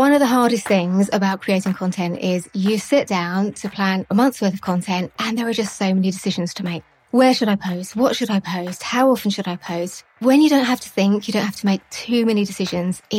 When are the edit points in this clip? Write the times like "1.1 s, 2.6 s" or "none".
4.1 s, 6.9 s, 10.2 s